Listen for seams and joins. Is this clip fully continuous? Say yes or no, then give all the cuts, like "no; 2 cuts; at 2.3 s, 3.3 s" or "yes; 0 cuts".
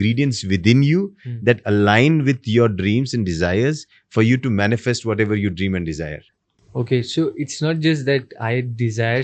yes; 0 cuts